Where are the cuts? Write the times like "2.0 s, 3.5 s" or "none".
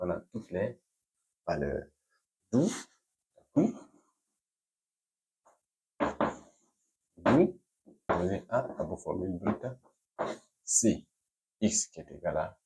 3.6 s, 8.1 s